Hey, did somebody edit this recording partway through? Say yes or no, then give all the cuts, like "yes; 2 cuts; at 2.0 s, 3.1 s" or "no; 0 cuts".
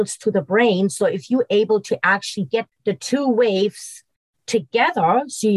yes; 1 cut; at 2.7 s